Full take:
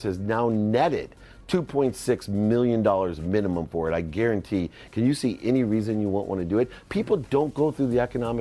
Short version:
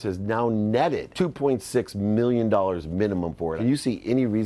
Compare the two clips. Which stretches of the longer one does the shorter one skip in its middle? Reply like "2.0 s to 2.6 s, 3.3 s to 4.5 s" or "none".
1.1 s to 1.4 s, 3.9 s to 4.9 s